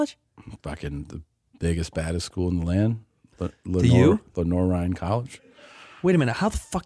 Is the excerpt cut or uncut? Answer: cut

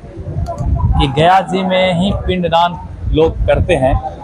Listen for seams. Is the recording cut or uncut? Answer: uncut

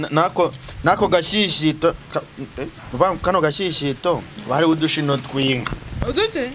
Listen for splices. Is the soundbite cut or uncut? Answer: uncut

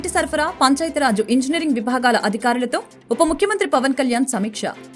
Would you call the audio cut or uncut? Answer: uncut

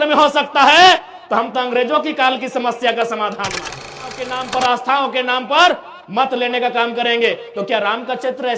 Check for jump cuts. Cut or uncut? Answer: cut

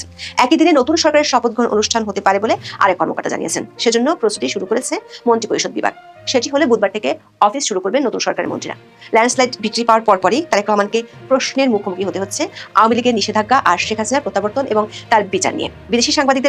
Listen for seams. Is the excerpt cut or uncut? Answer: uncut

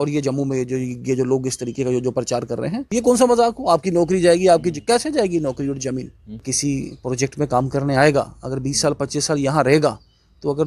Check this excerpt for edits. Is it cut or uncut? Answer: cut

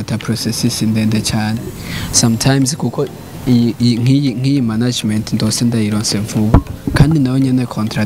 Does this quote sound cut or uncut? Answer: uncut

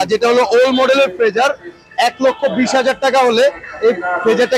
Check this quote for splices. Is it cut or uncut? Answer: uncut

